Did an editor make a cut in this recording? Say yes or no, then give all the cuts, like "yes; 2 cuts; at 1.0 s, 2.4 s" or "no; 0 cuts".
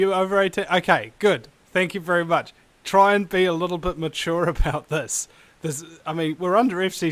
no; 0 cuts